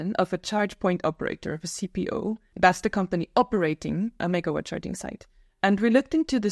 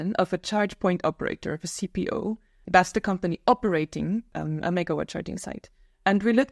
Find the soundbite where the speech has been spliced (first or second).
first